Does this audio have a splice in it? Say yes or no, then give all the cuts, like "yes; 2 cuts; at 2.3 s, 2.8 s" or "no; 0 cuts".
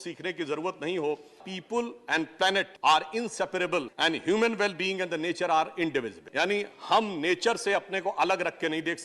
yes; 4 cuts; at 1.5 s, 2.7 s, 3.9 s, 6.2 s